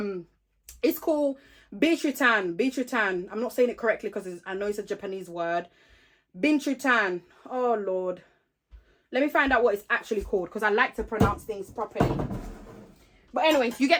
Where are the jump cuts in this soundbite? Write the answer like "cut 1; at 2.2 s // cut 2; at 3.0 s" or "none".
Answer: none